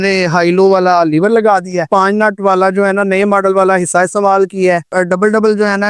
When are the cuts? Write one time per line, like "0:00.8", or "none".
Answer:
0:01.9
0:04.9